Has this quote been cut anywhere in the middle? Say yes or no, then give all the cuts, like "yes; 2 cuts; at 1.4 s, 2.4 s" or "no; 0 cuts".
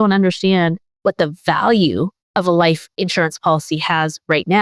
yes; 1 cut; at 0.9 s